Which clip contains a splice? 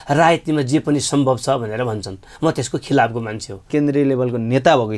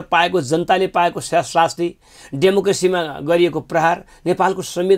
first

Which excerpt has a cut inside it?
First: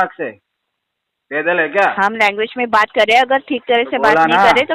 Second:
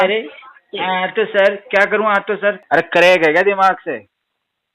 second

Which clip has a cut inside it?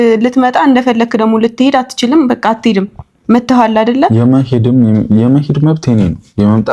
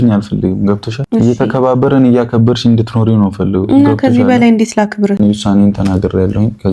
second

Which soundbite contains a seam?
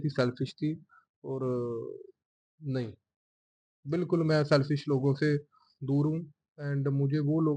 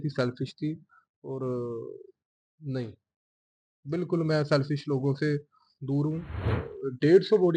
second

